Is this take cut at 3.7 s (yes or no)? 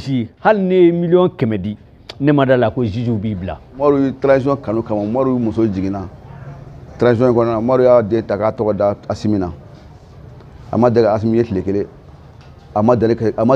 yes